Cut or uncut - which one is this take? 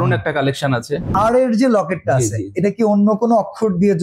cut